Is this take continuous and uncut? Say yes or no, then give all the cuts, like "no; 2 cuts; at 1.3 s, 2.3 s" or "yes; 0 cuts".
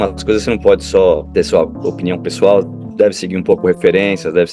no; 1 cut; at 1.3 s